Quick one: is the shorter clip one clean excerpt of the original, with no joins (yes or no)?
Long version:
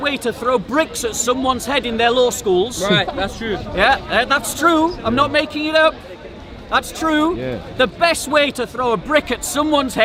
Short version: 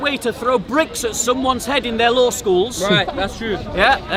yes